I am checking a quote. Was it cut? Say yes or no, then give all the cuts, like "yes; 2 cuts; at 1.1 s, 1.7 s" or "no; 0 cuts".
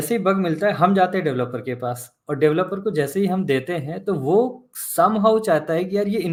no; 0 cuts